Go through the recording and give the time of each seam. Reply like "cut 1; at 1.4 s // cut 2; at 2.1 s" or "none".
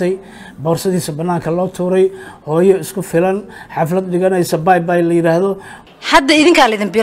cut 1; at 5.7 s